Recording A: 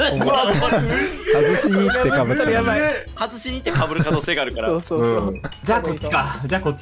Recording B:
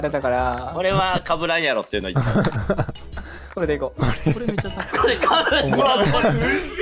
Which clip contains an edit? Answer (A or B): A